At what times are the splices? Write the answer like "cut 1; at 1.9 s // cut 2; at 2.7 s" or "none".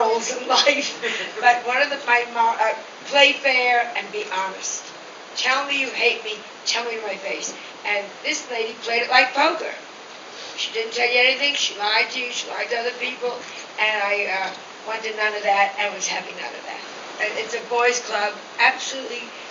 cut 1; at 17.0 s

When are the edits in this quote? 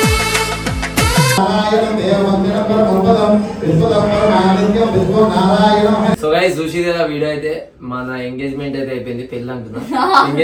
none

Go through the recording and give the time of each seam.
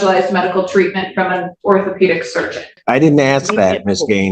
cut 1; at 2.8 s

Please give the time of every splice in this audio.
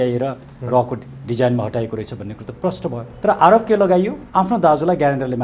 cut 1; at 3.0 s // cut 2; at 4.2 s

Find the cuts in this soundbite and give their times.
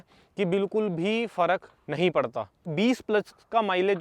cut 1; at 2.7 s

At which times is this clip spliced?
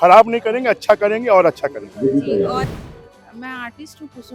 cut 1; at 2.7 s

